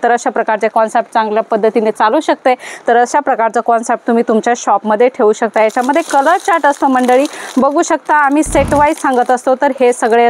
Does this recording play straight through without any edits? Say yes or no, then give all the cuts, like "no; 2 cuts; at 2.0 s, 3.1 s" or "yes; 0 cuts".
yes; 0 cuts